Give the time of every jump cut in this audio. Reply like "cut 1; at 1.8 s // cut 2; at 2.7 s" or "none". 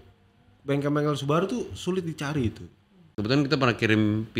cut 1; at 3.1 s